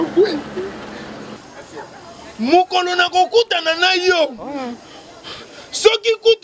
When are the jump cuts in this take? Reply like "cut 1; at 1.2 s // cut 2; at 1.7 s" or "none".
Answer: cut 1; at 1.3 s